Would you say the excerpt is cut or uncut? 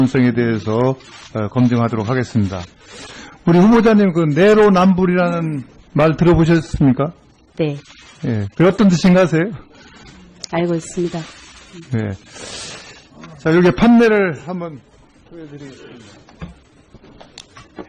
uncut